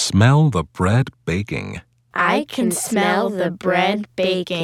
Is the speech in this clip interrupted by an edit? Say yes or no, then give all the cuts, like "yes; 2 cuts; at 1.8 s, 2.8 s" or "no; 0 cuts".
no; 0 cuts